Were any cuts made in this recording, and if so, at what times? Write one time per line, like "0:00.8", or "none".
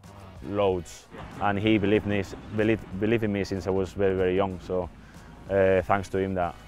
0:01.3